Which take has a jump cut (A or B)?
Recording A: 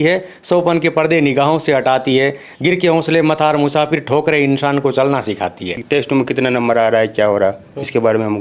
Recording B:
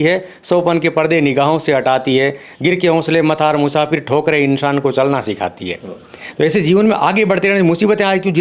A